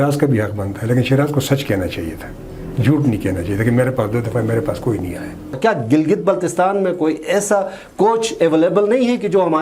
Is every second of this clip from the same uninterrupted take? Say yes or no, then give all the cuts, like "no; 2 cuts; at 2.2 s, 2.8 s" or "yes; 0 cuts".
no; 1 cut; at 5.6 s